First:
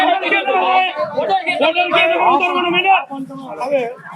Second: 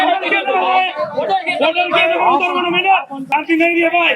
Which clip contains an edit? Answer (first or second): second